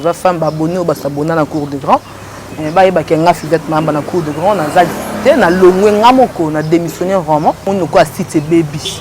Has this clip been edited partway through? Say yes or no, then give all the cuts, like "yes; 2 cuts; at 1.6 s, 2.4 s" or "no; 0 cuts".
yes; 1 cut; at 7.6 s